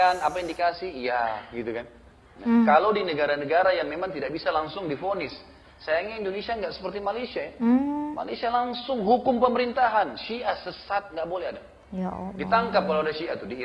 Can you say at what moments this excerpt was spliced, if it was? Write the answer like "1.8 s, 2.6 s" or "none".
2.3 s